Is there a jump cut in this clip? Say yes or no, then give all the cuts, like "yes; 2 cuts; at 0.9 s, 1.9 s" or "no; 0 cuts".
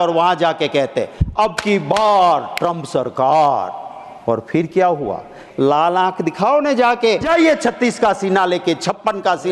yes; 2 cuts; at 5.4 s, 7.2 s